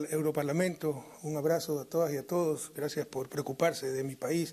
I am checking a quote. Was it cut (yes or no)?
no